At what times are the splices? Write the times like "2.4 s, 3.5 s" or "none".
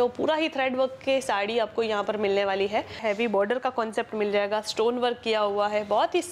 3.0 s